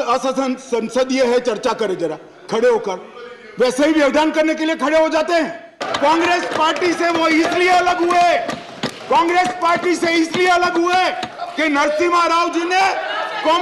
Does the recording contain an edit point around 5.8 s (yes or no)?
yes